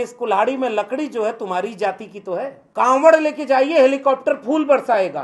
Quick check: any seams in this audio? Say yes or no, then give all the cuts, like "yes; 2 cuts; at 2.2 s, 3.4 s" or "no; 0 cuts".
yes; 1 cut; at 2.6 s